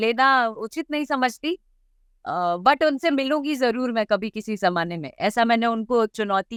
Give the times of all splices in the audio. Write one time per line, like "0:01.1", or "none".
none